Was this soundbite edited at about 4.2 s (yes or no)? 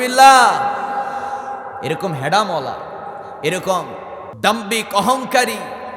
yes